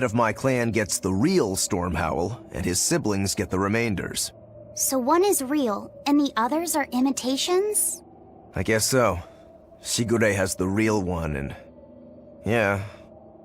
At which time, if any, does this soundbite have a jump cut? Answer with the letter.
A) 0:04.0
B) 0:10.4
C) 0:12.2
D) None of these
C